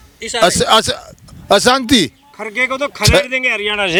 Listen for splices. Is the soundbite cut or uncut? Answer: uncut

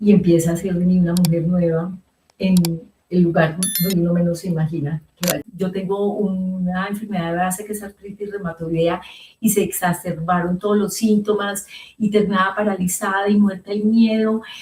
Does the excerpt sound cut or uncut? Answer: cut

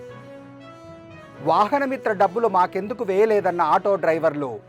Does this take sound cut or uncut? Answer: cut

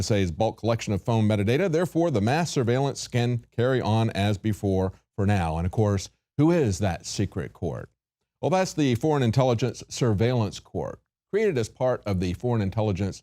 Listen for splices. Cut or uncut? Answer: cut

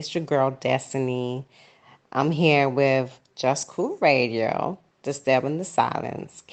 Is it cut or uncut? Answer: uncut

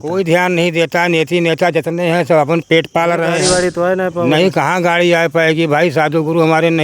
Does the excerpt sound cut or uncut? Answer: cut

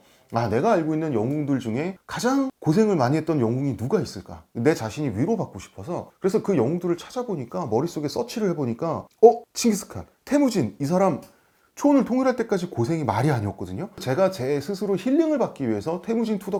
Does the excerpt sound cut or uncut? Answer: uncut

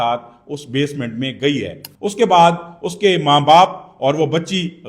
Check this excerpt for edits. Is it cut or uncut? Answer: cut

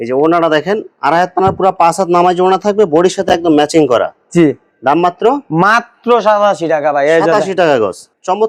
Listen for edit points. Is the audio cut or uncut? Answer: uncut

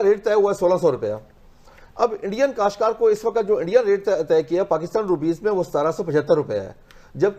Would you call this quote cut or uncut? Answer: uncut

